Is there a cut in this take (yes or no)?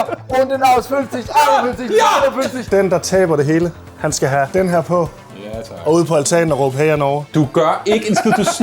yes